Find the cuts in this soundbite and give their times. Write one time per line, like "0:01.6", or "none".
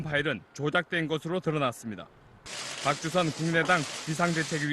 0:02.0